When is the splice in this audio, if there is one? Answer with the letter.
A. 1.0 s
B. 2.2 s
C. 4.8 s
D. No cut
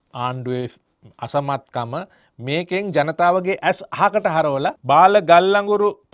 C